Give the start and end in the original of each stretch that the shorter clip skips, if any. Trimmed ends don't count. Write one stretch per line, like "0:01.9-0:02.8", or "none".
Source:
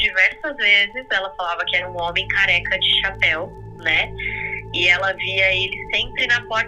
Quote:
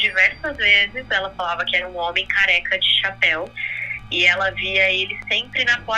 0:03.7-0:04.4